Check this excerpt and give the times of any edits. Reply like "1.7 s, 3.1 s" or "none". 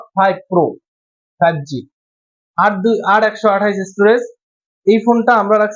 none

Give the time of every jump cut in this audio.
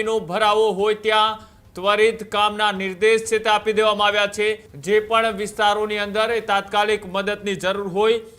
4.7 s

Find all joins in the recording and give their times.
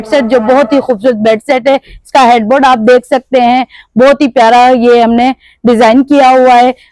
none

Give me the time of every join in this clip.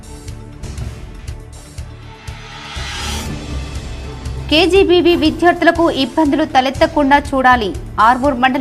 none

